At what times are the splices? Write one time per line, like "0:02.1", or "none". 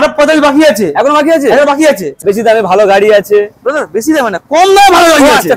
0:02.2